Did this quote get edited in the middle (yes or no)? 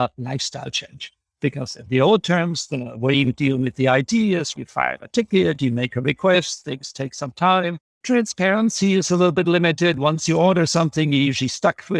no